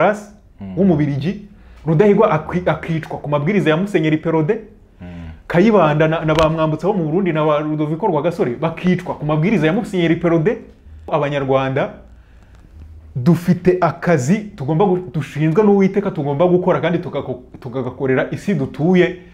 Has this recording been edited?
yes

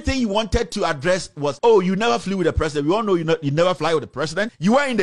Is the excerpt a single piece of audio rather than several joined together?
no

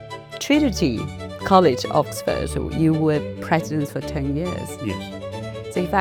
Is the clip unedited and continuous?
yes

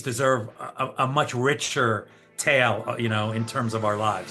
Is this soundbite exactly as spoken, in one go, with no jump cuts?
yes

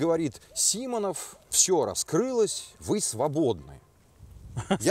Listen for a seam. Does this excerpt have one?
no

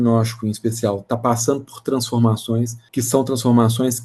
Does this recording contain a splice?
yes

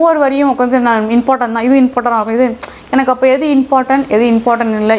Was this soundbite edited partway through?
no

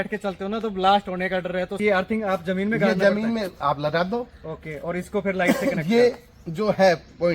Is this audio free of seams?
no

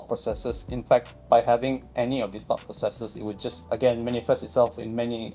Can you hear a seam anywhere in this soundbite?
yes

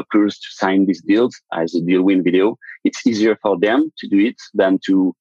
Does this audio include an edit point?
no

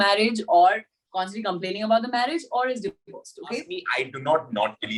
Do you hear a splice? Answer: yes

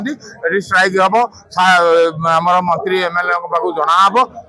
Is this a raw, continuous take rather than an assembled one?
no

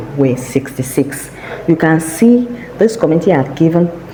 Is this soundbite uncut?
yes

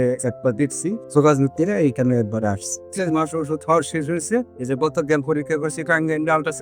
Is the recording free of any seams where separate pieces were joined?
no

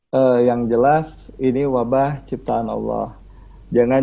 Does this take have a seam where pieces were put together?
no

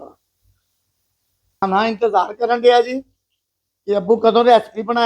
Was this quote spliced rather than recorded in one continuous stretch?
yes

